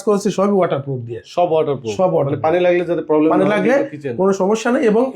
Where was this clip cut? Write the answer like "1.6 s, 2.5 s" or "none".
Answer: none